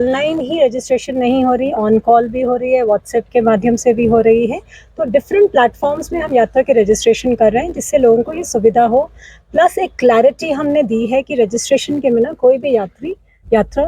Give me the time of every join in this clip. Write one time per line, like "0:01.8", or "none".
none